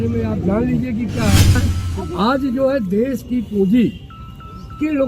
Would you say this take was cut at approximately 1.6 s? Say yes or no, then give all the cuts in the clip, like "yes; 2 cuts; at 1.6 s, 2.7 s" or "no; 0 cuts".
yes; 1 cut; at 1.6 s